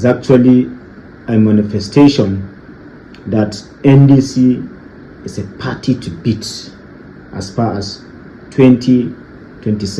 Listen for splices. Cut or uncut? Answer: uncut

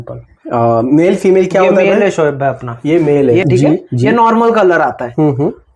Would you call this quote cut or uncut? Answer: cut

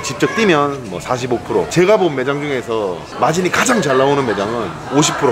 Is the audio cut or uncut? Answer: uncut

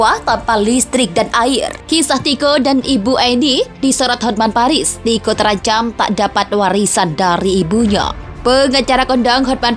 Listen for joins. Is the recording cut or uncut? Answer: cut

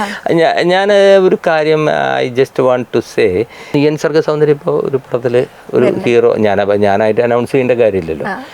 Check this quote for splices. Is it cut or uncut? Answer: cut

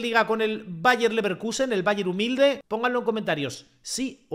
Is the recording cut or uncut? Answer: cut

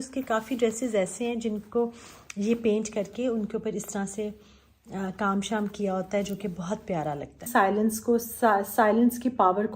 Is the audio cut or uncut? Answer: cut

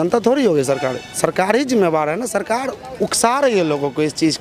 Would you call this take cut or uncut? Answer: uncut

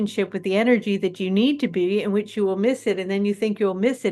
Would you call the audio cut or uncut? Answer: uncut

